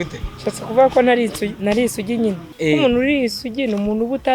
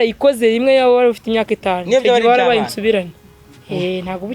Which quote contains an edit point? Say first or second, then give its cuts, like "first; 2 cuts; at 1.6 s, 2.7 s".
first; 1 cut; at 2.5 s